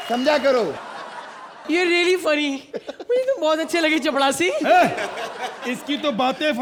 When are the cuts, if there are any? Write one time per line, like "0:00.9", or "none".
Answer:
none